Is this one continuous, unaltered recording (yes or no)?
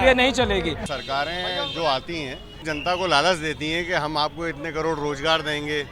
no